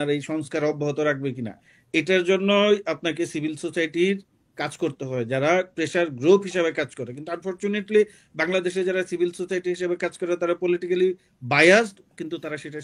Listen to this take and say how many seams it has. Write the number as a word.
zero